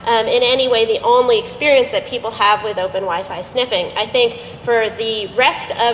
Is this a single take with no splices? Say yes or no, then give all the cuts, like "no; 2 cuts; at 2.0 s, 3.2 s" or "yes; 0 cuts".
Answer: no; 1 cut; at 1.1 s